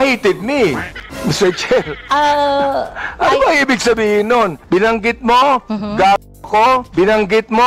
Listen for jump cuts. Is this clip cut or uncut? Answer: uncut